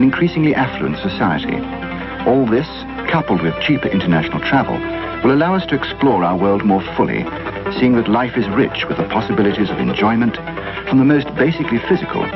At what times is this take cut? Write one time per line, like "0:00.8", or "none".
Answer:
0:04.1

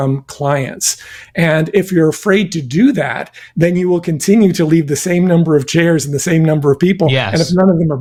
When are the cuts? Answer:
none

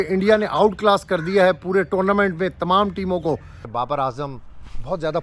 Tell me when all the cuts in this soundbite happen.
0:03.6

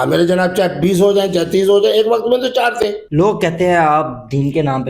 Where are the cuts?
0:03.0

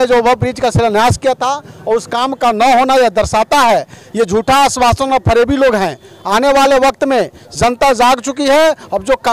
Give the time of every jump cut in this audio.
none

